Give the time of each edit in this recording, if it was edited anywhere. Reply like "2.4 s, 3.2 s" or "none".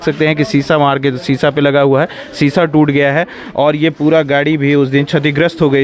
none